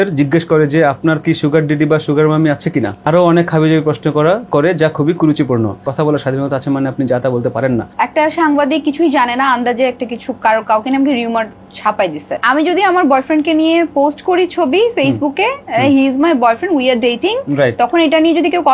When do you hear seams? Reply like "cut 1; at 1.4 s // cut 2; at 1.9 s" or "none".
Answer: cut 1; at 3.0 s // cut 2; at 5.8 s // cut 3; at 7.9 s // cut 4; at 12.4 s